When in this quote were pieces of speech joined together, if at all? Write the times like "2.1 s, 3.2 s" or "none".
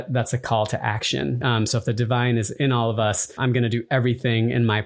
1.4 s, 3.4 s